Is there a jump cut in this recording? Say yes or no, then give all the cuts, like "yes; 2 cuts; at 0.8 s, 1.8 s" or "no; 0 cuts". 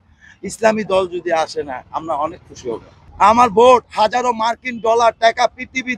yes; 1 cut; at 3.0 s